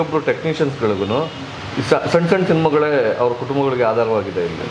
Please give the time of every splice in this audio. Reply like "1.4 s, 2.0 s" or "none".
none